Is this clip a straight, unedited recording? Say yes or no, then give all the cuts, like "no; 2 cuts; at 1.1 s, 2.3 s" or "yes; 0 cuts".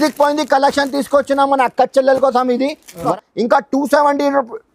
no; 1 cut; at 3.1 s